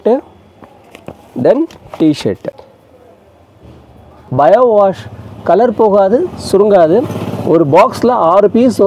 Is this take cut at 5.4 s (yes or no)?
no